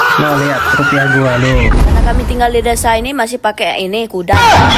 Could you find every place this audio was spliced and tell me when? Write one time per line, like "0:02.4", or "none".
0:01.8

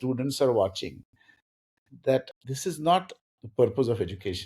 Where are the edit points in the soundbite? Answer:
0:02.3

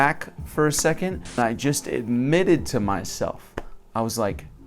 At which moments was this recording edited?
0:01.4

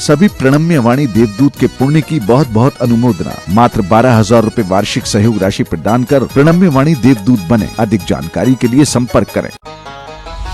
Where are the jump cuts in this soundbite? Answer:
0:09.6

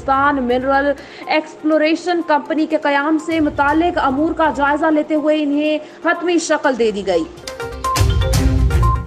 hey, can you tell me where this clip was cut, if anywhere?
0:07.6

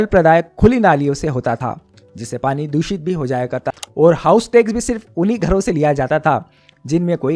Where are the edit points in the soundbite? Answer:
0:03.7

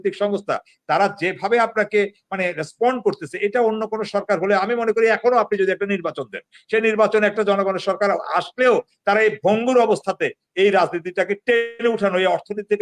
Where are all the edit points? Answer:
none

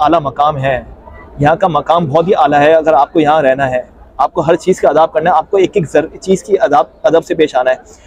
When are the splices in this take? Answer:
none

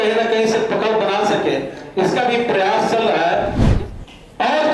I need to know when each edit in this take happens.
0:03.6

